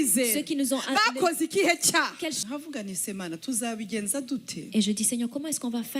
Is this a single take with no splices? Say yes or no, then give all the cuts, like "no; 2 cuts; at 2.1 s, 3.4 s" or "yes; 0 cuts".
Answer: no; 1 cut; at 2.4 s